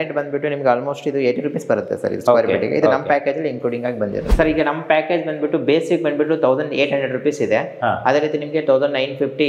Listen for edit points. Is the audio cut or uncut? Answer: cut